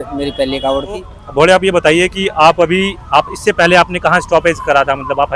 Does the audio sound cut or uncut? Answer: cut